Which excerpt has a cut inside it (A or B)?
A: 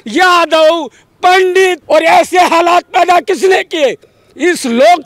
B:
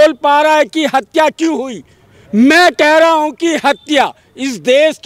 A